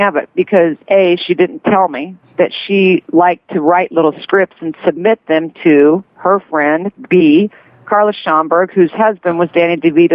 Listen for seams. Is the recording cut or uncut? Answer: uncut